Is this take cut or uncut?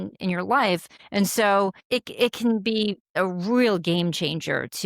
cut